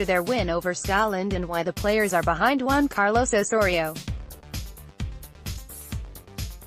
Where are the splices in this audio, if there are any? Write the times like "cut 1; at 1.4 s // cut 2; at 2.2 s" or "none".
cut 1; at 3.9 s // cut 2; at 5.6 s